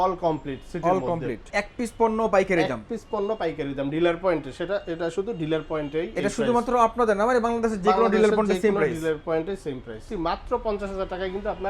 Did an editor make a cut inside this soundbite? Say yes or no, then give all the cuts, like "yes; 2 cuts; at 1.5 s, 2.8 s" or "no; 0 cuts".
yes; 2 cuts; at 1.5 s, 10.1 s